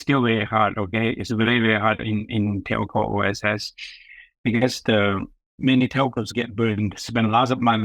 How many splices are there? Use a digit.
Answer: 1